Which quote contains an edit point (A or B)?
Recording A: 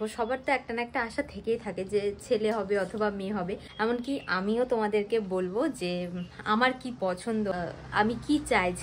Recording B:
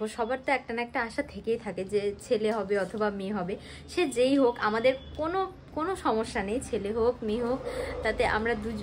A